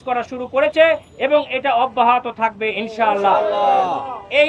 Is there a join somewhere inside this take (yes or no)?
no